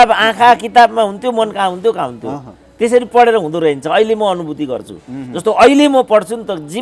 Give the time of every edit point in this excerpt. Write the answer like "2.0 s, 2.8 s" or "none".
none